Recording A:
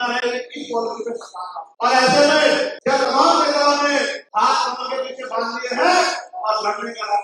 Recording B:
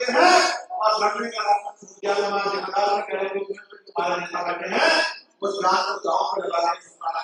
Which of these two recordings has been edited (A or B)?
A